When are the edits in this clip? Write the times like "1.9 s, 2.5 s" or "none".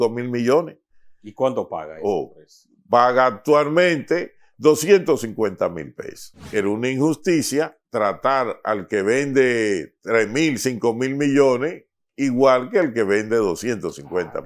6.5 s